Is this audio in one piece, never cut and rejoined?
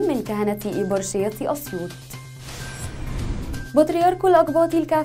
no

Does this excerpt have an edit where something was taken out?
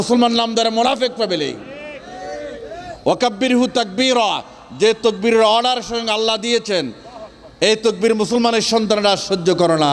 no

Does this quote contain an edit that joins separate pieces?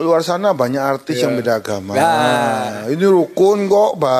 no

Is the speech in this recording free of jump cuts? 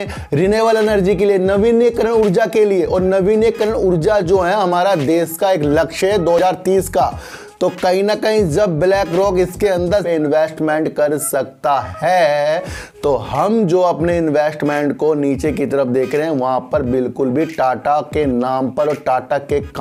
yes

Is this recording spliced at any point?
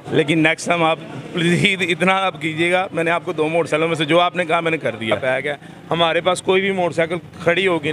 yes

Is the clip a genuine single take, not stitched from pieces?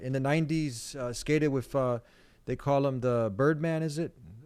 yes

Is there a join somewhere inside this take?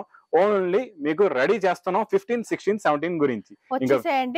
no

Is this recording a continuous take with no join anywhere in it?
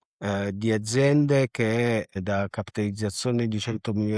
yes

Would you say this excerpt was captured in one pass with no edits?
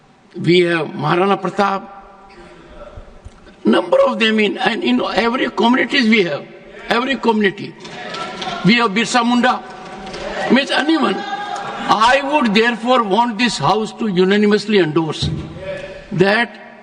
yes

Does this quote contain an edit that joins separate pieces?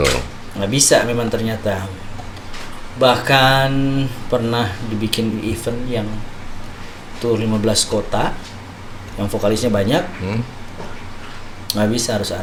no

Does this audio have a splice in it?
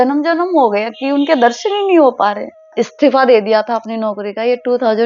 yes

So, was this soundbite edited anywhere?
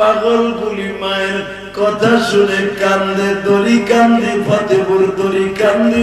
no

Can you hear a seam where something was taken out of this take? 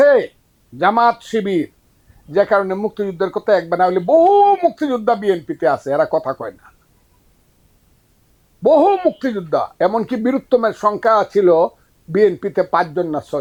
no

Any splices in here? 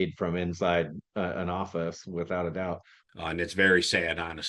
yes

